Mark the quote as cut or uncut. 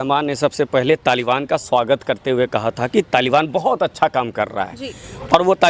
uncut